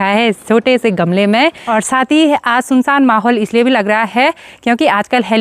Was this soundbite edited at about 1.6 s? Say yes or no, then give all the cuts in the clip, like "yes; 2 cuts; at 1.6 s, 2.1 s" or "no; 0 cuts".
yes; 1 cut; at 1.6 s